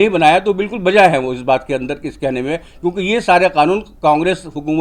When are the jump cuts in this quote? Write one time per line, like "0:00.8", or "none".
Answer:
none